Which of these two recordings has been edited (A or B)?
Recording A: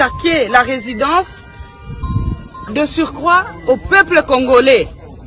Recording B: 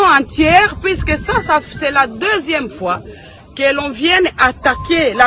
A